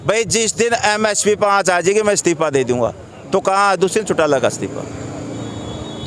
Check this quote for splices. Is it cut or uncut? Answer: uncut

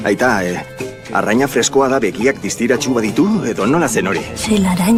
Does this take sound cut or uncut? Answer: uncut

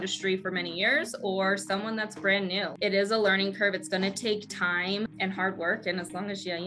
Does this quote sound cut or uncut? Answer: cut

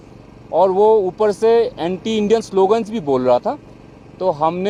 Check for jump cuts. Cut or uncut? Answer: uncut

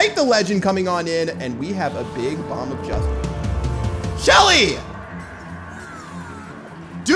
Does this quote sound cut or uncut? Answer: cut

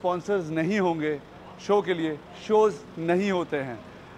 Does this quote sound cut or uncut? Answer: uncut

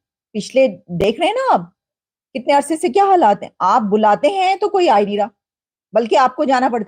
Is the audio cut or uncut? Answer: uncut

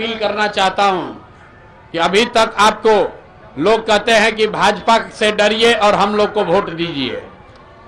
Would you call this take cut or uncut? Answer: uncut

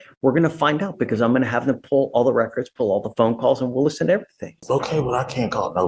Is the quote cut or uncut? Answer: cut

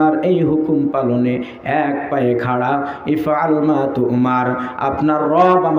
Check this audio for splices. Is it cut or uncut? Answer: uncut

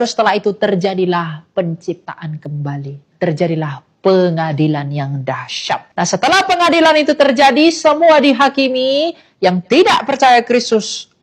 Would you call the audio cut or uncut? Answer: cut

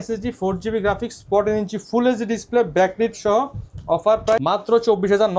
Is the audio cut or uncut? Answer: uncut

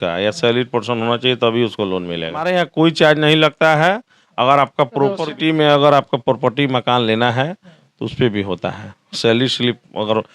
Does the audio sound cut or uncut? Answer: cut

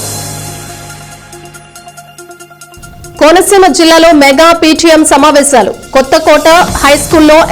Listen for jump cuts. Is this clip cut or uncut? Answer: cut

